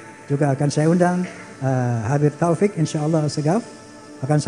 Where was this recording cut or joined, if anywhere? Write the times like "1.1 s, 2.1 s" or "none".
none